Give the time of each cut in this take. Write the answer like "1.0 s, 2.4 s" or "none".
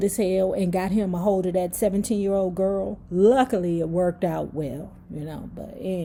none